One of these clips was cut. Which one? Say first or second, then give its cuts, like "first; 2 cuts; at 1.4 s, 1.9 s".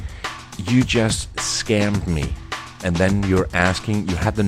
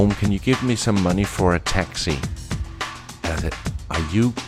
first; 1 cut; at 2.8 s